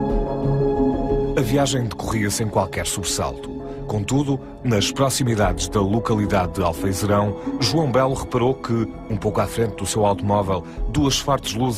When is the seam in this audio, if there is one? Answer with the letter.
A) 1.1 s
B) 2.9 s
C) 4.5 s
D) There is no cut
C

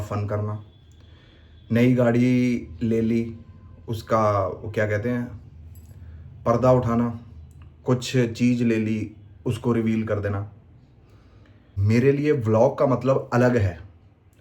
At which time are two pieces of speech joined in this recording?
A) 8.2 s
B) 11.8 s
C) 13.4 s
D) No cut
B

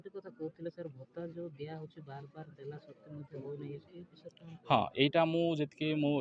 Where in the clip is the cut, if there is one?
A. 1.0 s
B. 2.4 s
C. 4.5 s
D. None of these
A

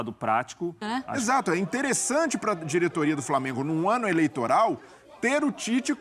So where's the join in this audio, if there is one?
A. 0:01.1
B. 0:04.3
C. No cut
A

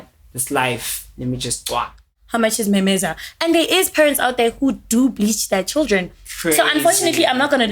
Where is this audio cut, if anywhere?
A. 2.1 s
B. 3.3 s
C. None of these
A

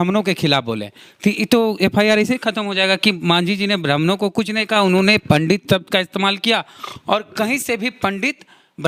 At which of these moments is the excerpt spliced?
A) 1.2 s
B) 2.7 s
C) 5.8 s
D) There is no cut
D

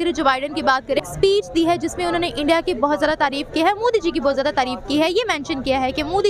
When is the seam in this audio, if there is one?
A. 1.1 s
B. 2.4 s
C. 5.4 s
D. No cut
A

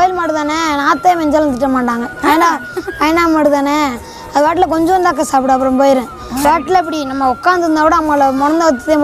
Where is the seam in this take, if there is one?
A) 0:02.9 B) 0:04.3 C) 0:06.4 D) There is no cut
C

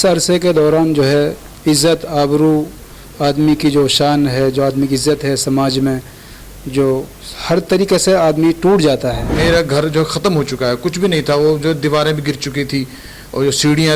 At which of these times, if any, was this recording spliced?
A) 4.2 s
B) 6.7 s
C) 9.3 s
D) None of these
C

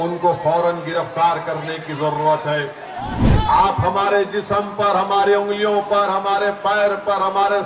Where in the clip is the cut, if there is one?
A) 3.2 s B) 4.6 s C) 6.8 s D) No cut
A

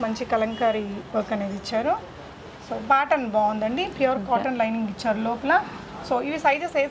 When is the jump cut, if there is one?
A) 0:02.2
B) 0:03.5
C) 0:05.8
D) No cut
D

